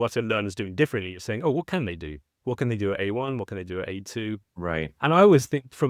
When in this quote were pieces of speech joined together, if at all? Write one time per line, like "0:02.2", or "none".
none